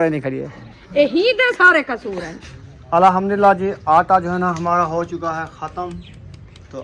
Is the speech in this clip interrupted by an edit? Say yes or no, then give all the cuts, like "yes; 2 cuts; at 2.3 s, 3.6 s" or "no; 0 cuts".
yes; 1 cut; at 2.4 s